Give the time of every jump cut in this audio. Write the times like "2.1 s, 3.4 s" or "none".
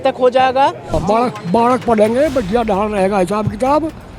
1.0 s